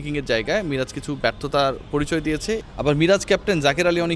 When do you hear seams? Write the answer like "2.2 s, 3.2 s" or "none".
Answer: 2.6 s